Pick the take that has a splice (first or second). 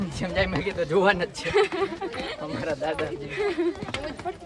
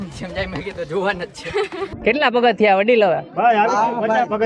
second